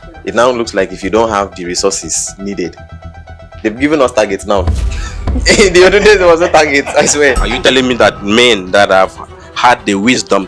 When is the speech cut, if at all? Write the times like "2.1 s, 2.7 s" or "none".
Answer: 7.5 s